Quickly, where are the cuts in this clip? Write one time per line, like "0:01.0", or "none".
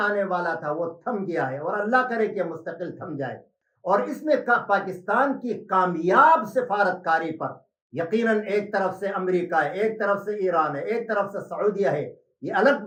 none